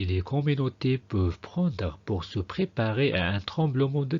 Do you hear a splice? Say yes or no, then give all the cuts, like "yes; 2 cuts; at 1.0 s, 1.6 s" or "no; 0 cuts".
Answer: yes; 1 cut; at 1.6 s